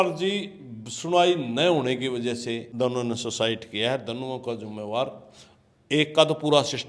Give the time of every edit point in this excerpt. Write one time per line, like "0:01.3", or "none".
0:02.7